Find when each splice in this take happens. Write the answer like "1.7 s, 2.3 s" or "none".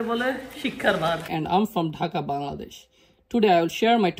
1.3 s